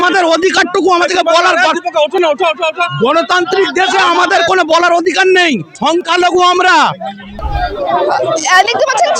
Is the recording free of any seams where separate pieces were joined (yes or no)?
no